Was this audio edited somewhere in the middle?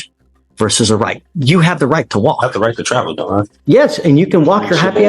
yes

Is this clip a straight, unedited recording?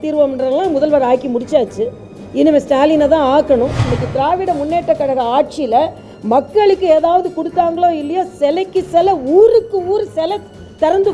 no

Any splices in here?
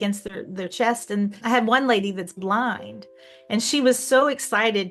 yes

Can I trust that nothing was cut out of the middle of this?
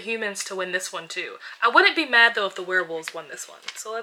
yes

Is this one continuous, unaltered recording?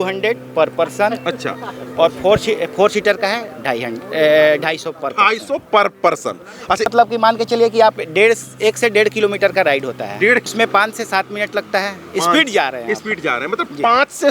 no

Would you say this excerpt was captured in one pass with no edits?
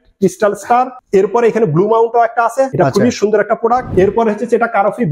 no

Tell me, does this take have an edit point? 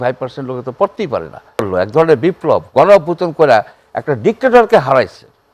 yes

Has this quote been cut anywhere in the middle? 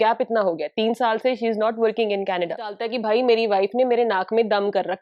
yes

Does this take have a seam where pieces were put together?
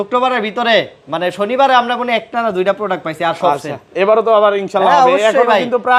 no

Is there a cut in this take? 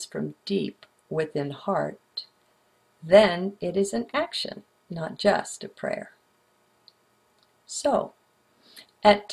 no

